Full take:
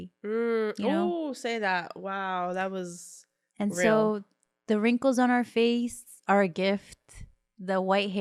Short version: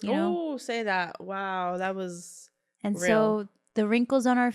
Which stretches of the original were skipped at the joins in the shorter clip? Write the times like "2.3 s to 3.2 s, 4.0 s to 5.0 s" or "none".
4.3 s to 4.5 s